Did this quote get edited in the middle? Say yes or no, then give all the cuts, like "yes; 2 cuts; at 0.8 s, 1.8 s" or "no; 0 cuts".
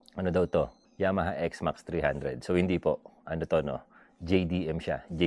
no; 0 cuts